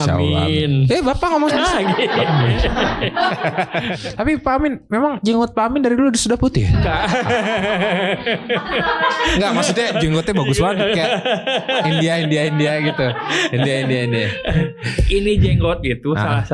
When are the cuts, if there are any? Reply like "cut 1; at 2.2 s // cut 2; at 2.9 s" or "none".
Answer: cut 1; at 3.9 s

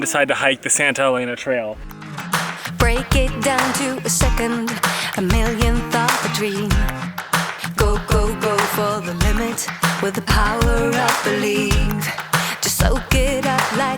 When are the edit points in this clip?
cut 1; at 1.9 s

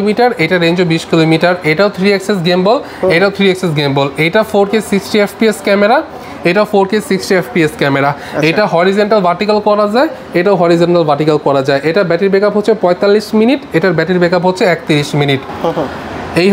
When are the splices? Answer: none

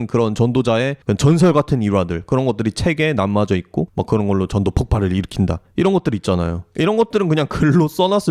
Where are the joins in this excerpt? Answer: cut 1; at 1.0 s // cut 2; at 4.0 s // cut 3; at 5.6 s // cut 4; at 6.6 s

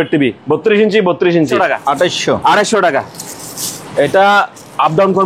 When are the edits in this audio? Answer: cut 1; at 1.5 s

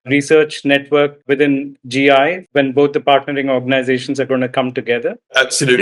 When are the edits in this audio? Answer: cut 1; at 1.3 s

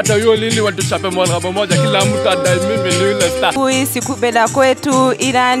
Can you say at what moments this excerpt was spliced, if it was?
cut 1; at 3.5 s

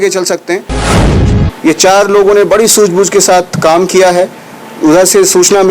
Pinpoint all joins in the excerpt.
cut 1; at 1.0 s

